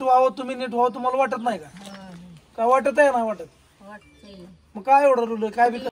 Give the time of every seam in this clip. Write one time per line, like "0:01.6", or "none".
none